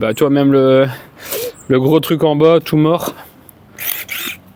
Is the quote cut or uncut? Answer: uncut